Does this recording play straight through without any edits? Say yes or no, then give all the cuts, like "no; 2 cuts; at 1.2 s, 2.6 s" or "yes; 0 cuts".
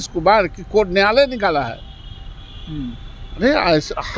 yes; 0 cuts